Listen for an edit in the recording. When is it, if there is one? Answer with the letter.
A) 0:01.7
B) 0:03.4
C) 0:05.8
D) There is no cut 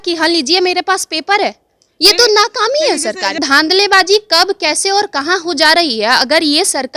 B